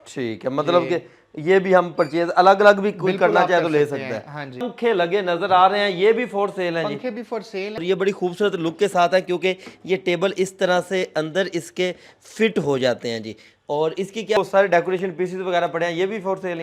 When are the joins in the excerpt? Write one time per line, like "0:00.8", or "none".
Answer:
0:04.7
0:07.8
0:14.4